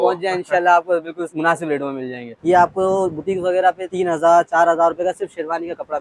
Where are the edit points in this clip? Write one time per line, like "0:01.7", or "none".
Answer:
0:01.2
0:02.3
0:03.9